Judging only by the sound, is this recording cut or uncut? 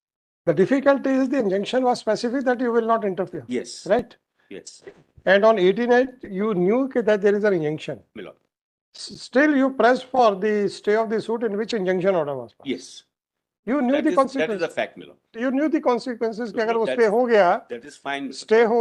uncut